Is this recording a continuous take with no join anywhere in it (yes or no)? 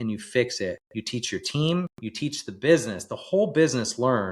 no